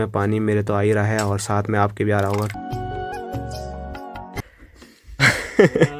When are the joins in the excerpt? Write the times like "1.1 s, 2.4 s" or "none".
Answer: 2.5 s, 4.4 s